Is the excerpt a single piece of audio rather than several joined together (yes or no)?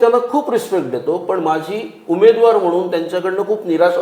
yes